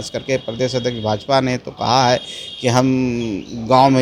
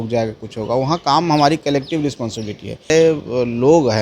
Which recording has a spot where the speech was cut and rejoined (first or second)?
second